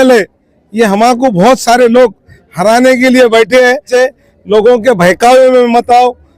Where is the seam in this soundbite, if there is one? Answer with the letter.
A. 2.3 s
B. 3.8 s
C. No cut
B